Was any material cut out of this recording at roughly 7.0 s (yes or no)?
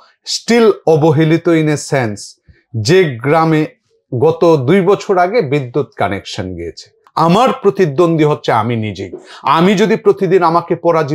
yes